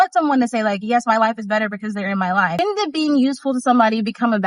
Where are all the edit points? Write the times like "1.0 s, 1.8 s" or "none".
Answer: 2.6 s